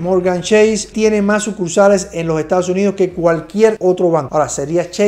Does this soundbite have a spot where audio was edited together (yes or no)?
yes